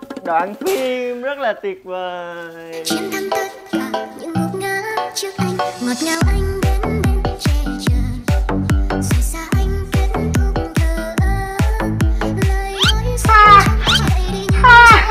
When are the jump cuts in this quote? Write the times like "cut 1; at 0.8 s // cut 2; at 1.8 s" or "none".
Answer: none